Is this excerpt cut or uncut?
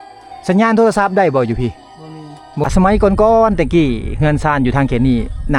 cut